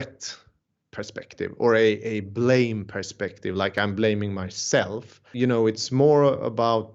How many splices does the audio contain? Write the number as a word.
one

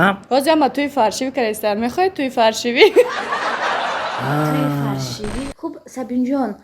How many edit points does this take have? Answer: one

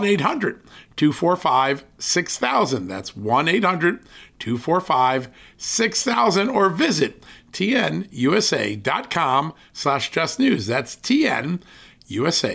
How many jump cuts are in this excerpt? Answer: zero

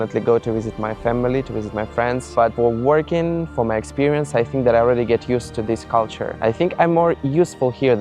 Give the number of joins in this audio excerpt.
two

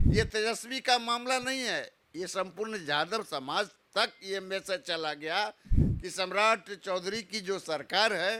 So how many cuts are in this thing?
zero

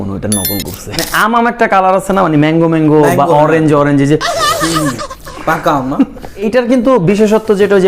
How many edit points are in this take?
two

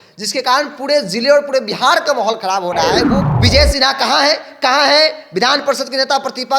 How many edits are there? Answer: one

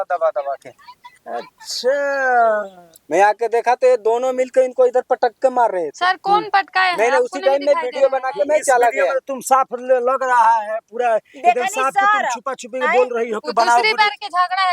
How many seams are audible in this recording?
one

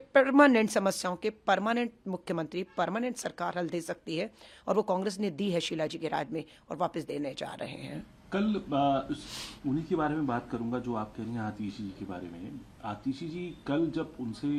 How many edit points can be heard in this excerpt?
zero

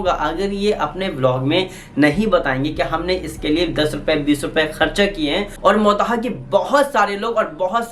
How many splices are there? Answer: one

